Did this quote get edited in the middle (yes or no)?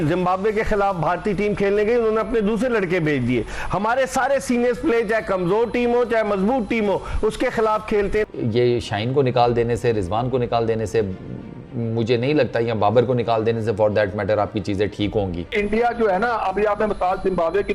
yes